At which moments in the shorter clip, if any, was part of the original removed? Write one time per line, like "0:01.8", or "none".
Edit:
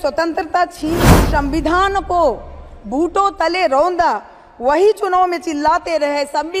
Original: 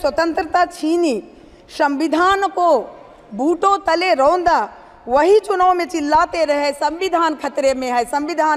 0:01.0